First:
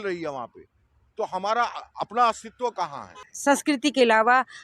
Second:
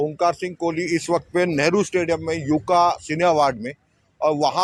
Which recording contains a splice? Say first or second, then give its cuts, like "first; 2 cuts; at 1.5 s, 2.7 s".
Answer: first; 1 cut; at 3.3 s